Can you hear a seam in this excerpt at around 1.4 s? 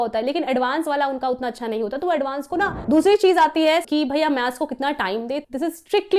no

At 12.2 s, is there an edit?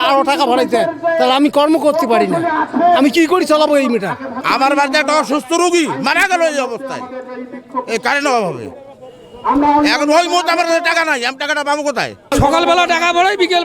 yes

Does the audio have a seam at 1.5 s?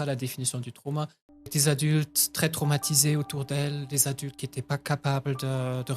yes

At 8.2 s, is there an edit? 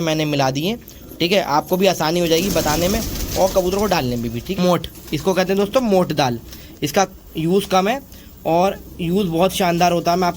no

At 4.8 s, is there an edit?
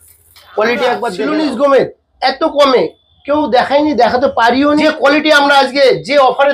yes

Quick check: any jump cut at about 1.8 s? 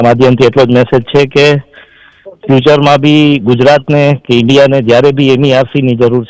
no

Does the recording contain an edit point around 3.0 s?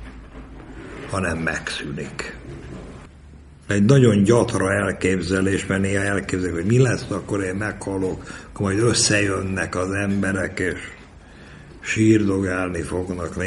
yes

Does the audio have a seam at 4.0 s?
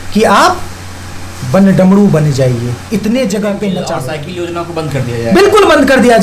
yes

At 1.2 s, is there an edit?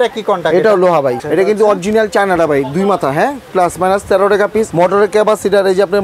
yes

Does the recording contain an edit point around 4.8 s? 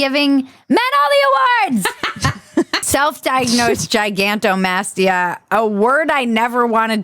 no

